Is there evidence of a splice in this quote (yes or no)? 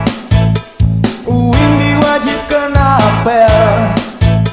yes